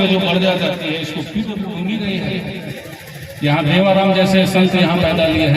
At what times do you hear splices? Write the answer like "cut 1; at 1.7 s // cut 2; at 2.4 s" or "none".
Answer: cut 1; at 1.5 s